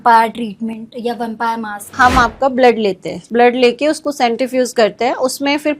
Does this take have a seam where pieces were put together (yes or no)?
yes